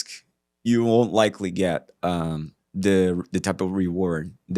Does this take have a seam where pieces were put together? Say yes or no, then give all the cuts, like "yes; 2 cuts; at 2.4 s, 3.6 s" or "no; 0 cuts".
no; 0 cuts